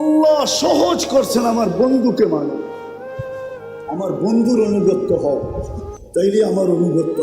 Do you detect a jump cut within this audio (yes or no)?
yes